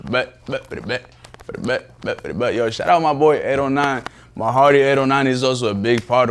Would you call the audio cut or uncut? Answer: uncut